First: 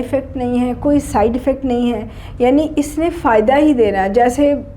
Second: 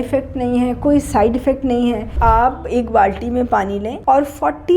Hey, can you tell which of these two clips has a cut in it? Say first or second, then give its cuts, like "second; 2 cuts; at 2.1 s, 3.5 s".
second; 2 cuts; at 2.1 s, 3.9 s